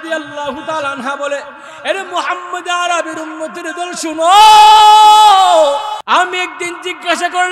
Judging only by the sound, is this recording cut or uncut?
cut